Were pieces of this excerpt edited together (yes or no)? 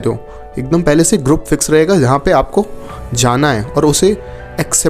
no